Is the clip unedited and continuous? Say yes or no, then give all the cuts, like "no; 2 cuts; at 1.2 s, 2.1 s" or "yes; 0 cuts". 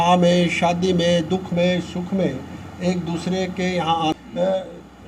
no; 1 cut; at 4.1 s